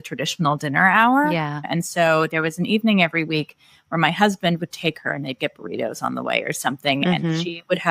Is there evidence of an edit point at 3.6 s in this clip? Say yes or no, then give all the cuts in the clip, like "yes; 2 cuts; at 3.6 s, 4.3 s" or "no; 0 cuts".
no; 1 cut; at 1.6 s